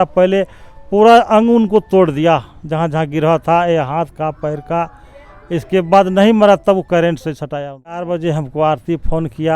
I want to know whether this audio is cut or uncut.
cut